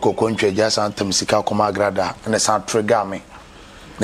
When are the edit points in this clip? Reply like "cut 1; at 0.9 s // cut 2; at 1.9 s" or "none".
none